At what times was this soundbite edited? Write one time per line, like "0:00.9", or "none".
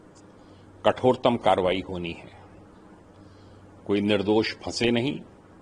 none